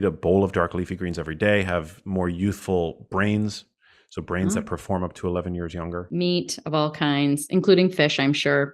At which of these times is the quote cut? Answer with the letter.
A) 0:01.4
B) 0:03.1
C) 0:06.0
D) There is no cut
C